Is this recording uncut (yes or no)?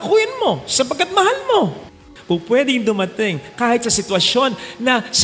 no